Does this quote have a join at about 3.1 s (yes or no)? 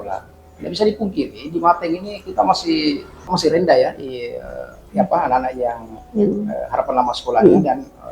no